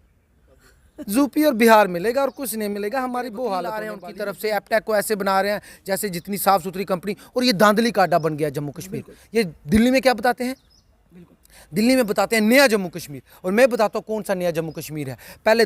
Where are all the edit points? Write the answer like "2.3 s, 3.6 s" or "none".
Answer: 4.0 s